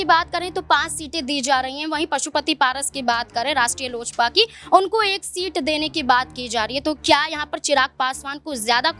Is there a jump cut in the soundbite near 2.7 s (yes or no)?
no